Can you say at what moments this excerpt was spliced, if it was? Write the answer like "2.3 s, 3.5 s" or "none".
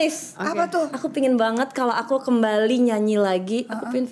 none